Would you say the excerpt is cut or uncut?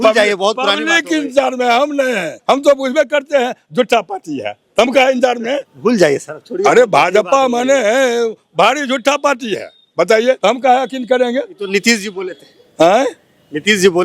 cut